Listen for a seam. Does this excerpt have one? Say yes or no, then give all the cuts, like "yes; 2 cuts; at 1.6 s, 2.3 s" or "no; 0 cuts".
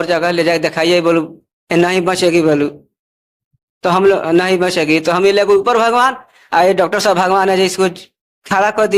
no; 0 cuts